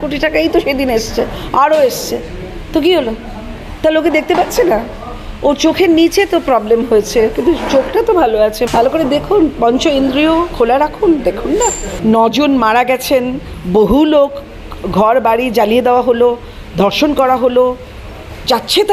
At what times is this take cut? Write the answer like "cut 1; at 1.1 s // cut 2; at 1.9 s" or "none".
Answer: cut 1; at 8.6 s // cut 2; at 11.9 s